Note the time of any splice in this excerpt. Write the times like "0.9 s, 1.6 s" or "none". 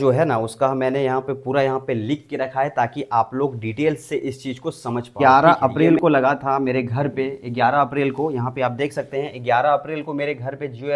5.1 s